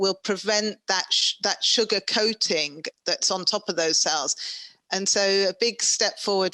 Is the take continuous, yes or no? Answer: yes